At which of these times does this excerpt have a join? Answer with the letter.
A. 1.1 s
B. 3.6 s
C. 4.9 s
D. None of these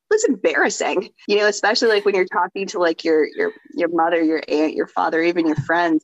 D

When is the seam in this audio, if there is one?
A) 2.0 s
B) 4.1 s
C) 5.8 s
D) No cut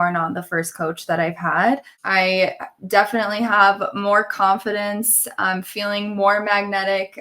A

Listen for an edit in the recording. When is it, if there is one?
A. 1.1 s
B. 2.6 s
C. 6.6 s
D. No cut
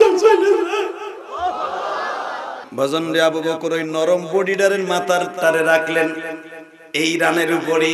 B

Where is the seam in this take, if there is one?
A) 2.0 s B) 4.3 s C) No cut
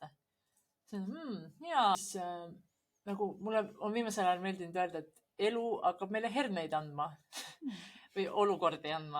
A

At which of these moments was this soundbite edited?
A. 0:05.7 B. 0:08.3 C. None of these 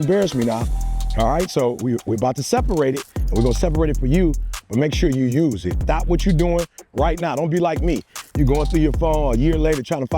A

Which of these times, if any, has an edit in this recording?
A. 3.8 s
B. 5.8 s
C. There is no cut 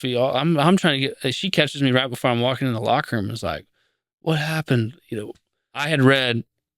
B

